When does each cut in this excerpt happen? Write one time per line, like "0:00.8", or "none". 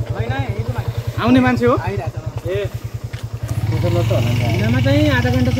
none

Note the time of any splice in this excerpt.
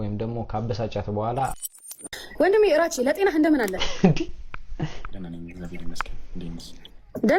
0:01.9

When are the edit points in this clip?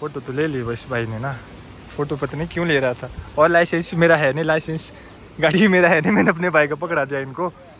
none

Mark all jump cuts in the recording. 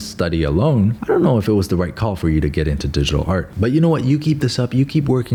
none

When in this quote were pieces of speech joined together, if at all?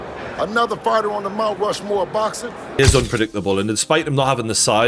0:02.8

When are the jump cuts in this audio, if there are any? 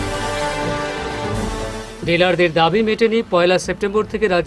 0:01.8

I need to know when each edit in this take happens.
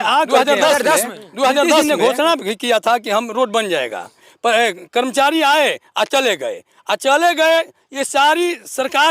0:01.8

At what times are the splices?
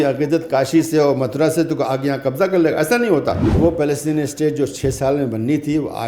0:03.5

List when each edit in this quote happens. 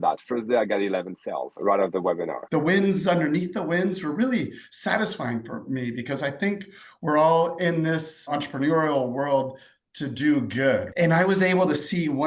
0:01.5
0:02.4
0:08.4
0:10.9

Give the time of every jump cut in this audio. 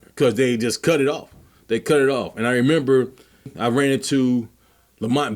0:03.5

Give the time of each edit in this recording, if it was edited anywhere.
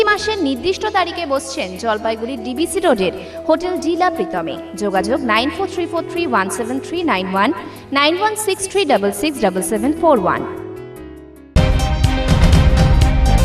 0:11.5

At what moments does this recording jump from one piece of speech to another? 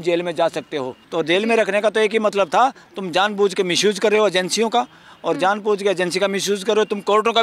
0:01.0

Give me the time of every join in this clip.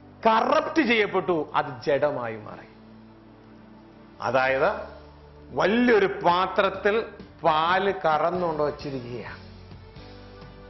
0:09.4

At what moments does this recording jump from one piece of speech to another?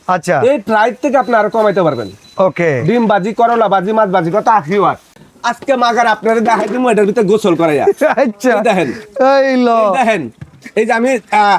0:05.1

